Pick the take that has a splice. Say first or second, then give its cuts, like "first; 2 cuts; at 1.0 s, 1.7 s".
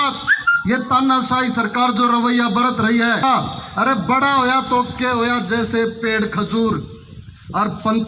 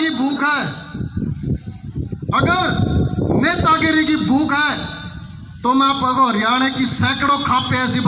first; 1 cut; at 3.2 s